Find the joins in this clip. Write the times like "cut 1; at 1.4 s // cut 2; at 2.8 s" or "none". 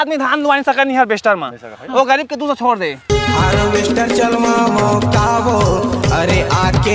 cut 1; at 3.0 s